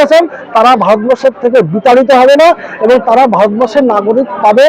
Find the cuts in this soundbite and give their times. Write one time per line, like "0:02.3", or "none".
none

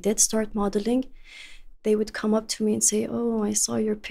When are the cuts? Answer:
none

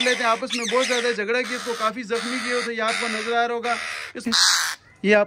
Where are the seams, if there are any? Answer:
0:04.2

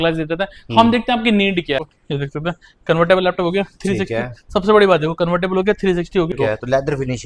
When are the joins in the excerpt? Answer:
0:01.9
0:06.3

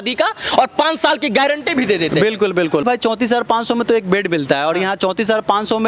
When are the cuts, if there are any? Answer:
0:02.8

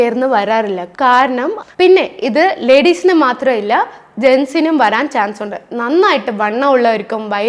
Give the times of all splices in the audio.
0:01.6

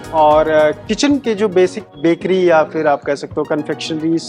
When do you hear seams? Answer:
0:01.8

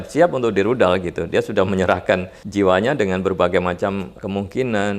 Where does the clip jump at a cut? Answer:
0:02.4
0:04.1

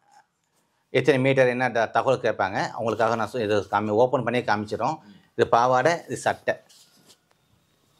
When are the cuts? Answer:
none

